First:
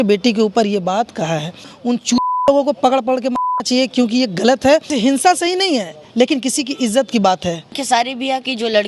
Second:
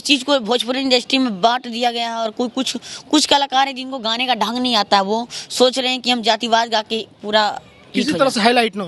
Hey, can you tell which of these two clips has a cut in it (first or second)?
first